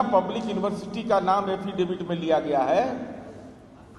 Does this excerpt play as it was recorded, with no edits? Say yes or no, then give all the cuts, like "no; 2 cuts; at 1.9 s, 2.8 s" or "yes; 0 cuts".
yes; 0 cuts